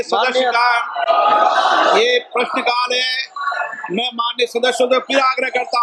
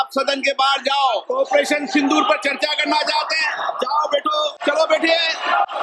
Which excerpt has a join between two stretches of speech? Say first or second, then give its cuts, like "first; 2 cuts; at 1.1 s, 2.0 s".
second; 2 cuts; at 1.2 s, 4.6 s